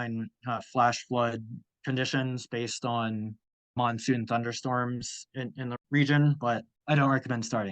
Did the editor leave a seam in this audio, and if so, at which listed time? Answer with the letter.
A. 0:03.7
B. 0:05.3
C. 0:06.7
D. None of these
C